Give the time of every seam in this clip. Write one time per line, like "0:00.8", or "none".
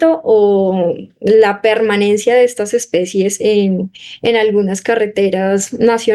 none